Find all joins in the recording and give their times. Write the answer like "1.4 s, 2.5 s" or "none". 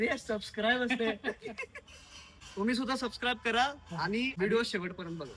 2.2 s, 4.3 s